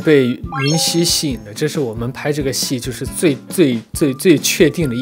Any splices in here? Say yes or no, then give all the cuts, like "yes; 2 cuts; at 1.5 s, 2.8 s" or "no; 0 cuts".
no; 0 cuts